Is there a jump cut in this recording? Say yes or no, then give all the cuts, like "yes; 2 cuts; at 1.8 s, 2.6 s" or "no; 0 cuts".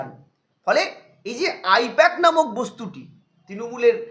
no; 0 cuts